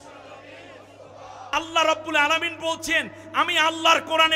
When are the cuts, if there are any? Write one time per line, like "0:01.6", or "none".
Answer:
0:01.5